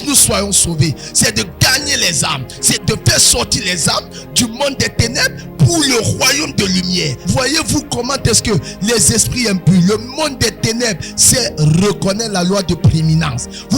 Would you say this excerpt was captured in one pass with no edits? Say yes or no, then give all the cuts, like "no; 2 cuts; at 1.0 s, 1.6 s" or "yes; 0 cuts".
no; 2 cuts; at 2.8 s, 7.2 s